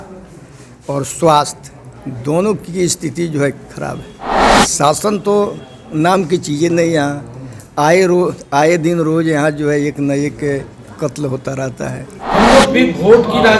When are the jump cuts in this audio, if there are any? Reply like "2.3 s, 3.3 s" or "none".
4.6 s, 12.3 s